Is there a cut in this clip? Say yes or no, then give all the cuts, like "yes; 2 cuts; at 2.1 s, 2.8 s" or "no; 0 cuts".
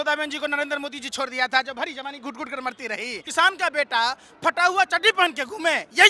yes; 1 cut; at 3.2 s